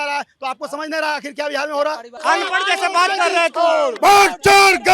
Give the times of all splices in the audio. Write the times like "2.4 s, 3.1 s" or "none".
2.1 s, 3.9 s